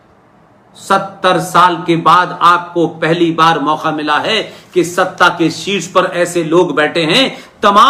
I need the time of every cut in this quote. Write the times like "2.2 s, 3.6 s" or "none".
none